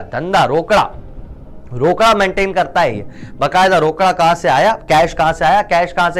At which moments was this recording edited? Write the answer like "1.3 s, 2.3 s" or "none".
none

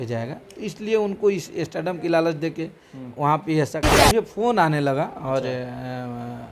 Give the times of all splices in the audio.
3.8 s

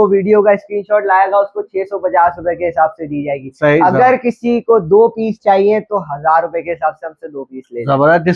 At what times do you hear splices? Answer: none

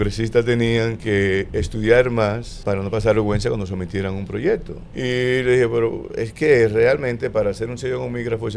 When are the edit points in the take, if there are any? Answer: 1.0 s, 2.5 s, 4.8 s

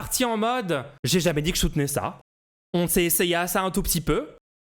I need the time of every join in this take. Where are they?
0.9 s

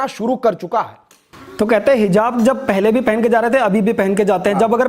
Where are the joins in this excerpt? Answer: none

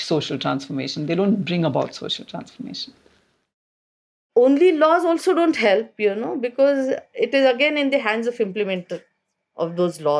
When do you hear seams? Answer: 4.2 s

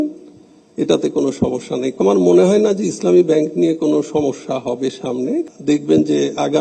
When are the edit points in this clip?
2.0 s, 5.5 s

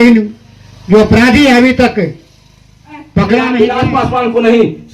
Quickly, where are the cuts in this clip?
3.6 s

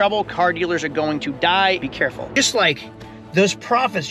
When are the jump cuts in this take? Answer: 2.0 s

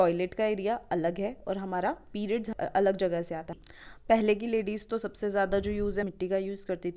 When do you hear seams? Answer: 2.5 s, 3.5 s, 6.0 s

